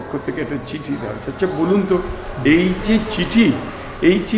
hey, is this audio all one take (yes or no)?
yes